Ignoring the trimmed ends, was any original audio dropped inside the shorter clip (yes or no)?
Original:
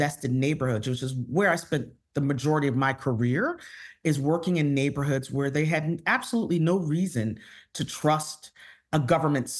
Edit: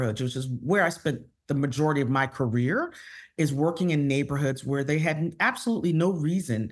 no